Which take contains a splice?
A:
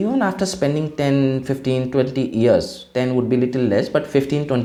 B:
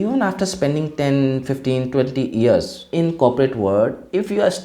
B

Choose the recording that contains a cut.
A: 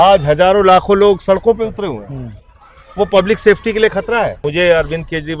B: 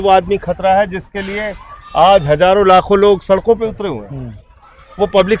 A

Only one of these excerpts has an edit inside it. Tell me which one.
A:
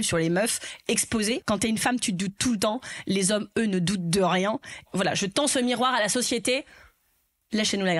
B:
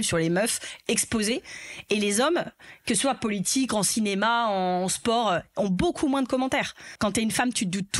A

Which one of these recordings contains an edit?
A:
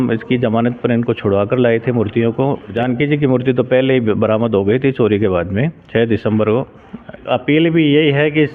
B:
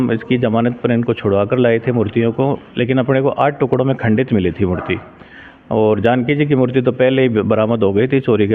A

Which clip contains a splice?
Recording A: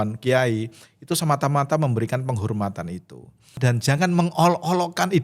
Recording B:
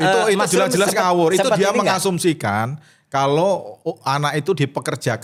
A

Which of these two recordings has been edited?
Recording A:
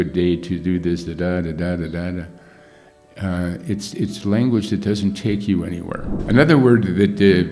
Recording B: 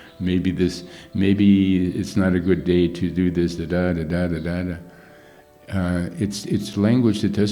A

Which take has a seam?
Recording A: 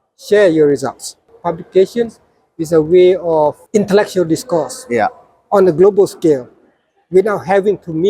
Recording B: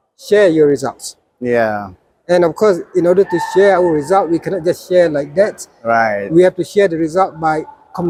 A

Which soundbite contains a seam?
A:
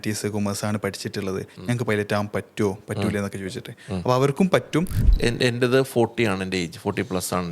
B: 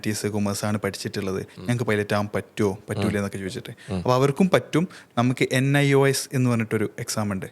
A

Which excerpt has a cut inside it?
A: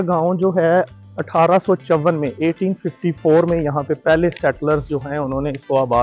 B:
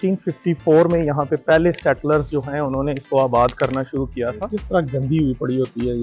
B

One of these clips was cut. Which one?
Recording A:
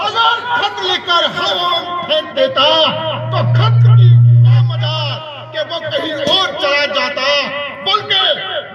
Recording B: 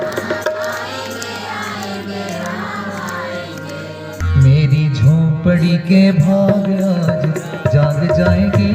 B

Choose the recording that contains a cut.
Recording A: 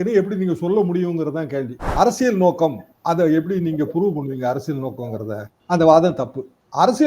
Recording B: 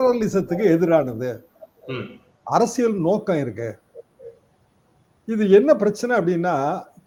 A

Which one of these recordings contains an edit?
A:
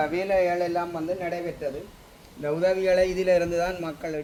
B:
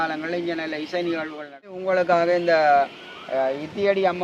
B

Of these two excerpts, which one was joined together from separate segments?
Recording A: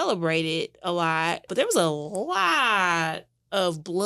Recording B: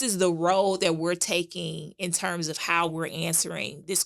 A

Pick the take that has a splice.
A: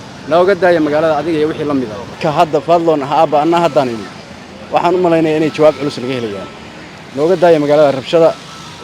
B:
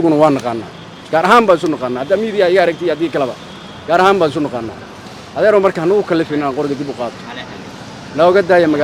A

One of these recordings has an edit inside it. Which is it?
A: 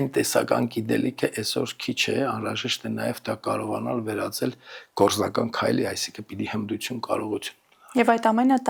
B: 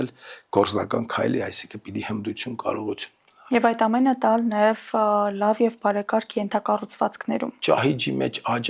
B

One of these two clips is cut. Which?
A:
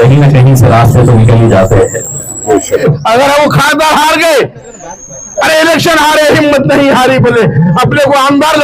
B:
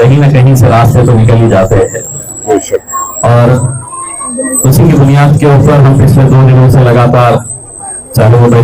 A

